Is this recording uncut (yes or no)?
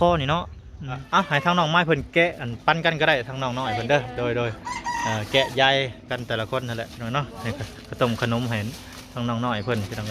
no